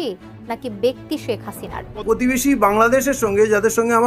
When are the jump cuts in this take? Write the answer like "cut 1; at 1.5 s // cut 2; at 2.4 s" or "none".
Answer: cut 1; at 2.0 s